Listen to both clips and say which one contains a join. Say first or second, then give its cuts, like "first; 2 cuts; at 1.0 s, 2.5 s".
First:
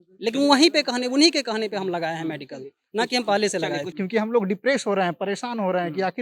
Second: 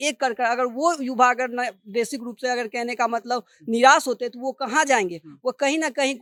first; 1 cut; at 3.9 s